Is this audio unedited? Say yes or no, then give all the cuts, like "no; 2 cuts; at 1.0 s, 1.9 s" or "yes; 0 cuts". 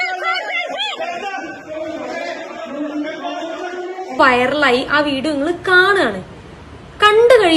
no; 1 cut; at 4.2 s